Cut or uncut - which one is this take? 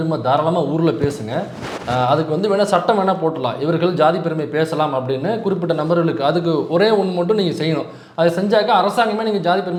uncut